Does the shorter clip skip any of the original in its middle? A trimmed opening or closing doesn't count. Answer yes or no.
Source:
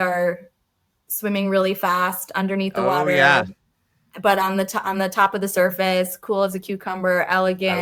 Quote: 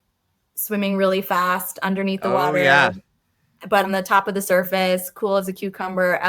yes